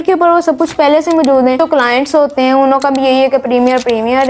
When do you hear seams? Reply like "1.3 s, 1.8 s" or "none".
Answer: 1.6 s